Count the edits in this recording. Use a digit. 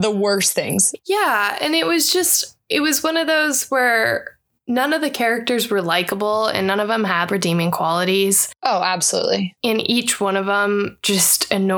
1